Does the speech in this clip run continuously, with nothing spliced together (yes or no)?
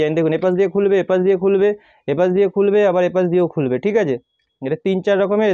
yes